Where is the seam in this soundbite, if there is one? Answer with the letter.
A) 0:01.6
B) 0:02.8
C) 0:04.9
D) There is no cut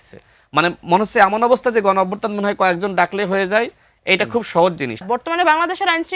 C